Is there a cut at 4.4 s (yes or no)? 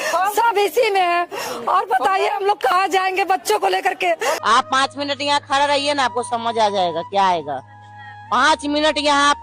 yes